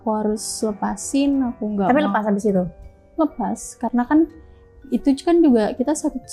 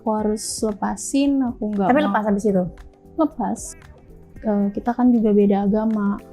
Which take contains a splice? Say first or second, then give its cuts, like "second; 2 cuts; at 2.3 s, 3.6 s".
second; 1 cut; at 3.7 s